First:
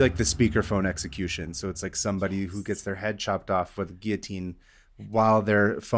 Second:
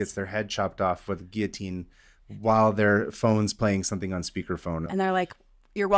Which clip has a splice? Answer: second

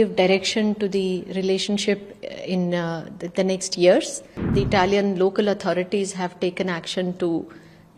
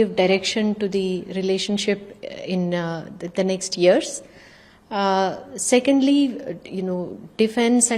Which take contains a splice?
first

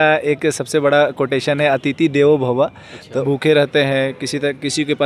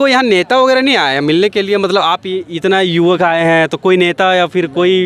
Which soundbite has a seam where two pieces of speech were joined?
first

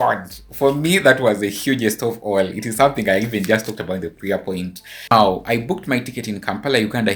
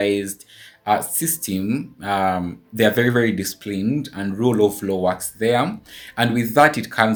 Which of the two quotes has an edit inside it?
first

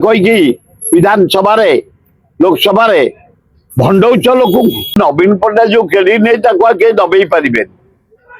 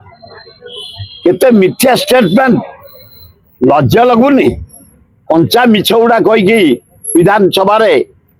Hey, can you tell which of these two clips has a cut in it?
first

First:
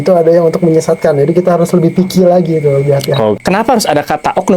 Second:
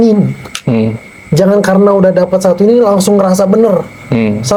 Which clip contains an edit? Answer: first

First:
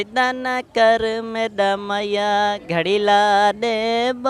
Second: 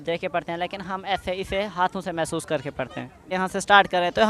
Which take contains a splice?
second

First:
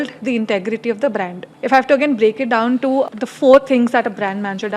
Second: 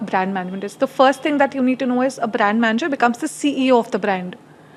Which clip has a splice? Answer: first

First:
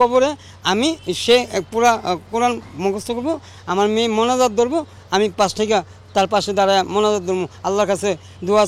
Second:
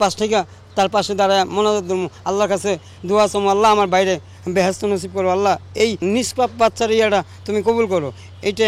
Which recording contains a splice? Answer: second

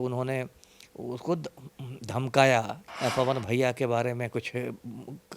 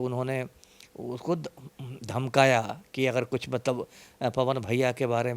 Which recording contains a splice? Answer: first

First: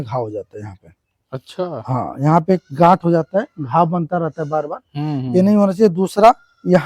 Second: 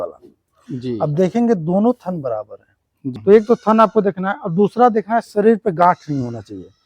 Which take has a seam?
second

